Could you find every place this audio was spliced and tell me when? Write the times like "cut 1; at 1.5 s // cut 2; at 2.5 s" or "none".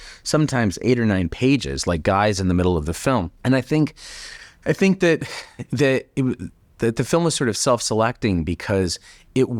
none